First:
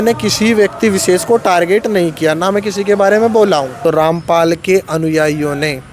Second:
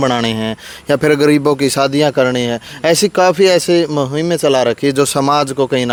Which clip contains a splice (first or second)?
first